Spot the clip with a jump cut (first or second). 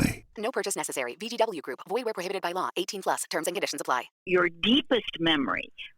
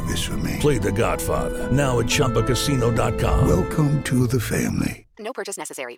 first